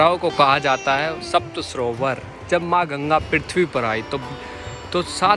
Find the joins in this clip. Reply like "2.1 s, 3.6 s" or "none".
none